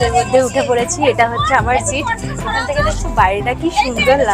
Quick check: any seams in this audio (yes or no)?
no